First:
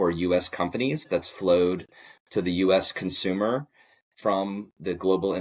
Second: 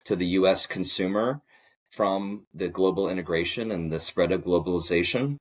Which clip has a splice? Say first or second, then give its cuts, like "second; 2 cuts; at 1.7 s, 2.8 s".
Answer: first; 1 cut; at 1.1 s